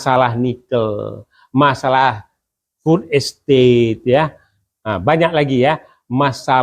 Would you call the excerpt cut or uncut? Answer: uncut